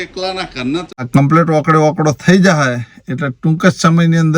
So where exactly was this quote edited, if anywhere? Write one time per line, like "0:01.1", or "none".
0:01.0